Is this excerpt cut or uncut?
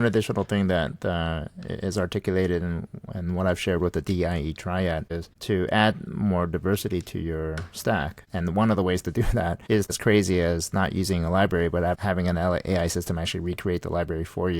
cut